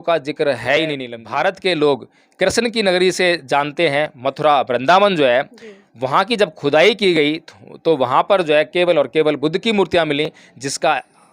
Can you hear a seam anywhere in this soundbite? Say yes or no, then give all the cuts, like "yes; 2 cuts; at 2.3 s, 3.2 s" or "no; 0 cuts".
yes; 1 cut; at 1.1 s